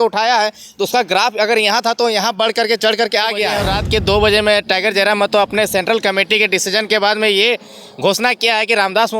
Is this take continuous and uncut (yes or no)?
no